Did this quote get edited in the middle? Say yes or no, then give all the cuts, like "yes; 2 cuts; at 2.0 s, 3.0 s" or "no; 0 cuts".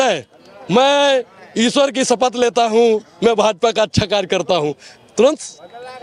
no; 0 cuts